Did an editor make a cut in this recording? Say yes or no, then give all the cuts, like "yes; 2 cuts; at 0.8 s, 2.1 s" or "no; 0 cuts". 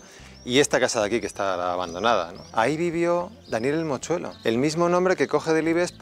yes; 2 cuts; at 2.4 s, 4.3 s